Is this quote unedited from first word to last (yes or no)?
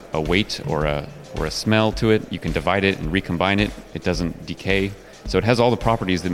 no